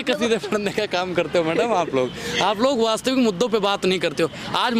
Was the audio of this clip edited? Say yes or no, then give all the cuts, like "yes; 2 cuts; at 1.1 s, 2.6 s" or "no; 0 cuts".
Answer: no; 0 cuts